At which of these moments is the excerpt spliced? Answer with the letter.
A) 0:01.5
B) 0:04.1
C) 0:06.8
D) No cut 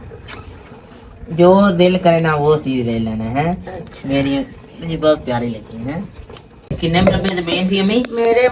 C